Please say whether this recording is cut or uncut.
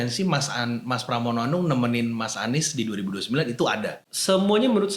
cut